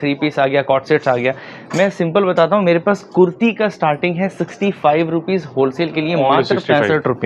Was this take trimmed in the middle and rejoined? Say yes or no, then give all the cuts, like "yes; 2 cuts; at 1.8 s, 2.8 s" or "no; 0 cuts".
no; 0 cuts